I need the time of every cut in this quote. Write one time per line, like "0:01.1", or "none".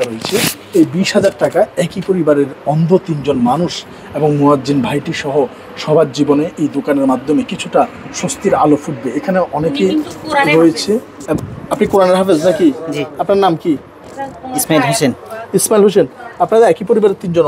none